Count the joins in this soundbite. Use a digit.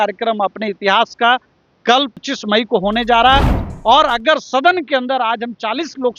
2